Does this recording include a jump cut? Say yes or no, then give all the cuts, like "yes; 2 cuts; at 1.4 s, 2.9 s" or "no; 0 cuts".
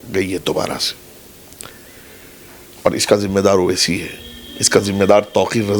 no; 0 cuts